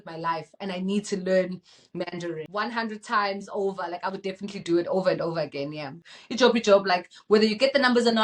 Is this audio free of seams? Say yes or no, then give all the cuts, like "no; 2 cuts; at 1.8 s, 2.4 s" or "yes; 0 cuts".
no; 2 cuts; at 2.4 s, 6.0 s